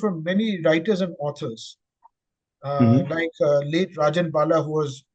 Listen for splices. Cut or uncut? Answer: uncut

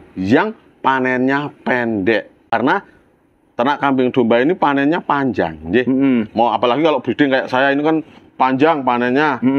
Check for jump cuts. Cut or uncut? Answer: cut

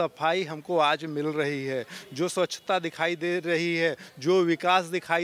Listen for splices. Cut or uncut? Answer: uncut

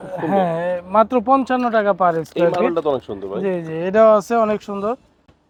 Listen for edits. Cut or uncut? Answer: uncut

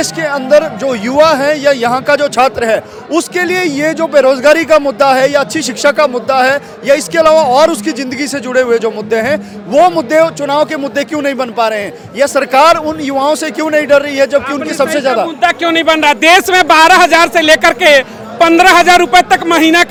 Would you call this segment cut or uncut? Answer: uncut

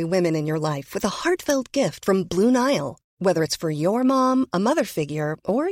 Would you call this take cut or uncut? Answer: uncut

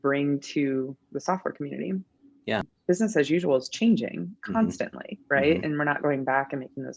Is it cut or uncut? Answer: cut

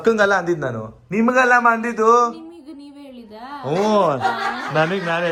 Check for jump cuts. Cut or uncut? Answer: uncut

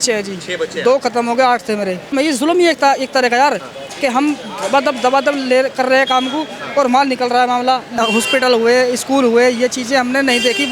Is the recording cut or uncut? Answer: cut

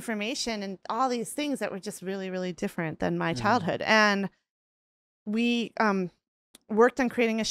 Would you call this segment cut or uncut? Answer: uncut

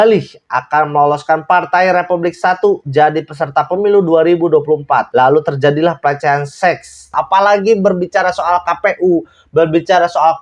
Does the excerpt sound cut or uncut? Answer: cut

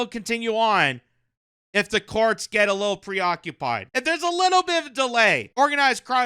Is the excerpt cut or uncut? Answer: cut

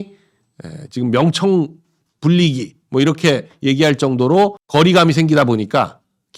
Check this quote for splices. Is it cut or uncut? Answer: uncut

